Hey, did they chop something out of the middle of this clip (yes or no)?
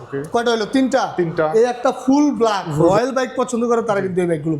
yes